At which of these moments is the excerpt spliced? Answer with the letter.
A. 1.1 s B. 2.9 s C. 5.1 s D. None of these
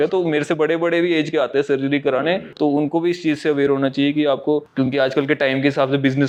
D